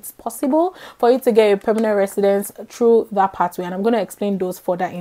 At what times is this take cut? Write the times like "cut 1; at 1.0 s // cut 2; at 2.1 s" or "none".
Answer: none